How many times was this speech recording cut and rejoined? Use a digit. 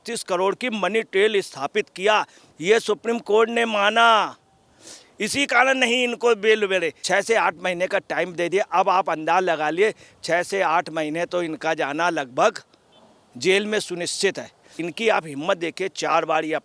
2